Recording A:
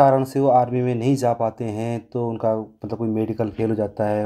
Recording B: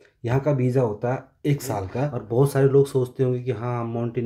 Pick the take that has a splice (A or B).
B